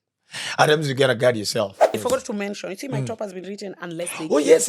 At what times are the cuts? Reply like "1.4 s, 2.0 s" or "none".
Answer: 1.9 s